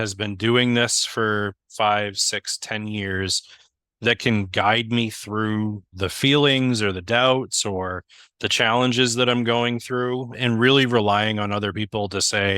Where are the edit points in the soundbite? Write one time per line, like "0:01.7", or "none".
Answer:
0:05.9
0:10.3